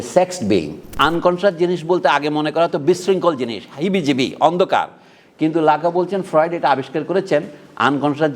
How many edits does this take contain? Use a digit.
1